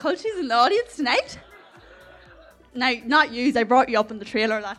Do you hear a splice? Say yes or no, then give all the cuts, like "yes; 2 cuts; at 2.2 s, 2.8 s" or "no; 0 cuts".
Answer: no; 0 cuts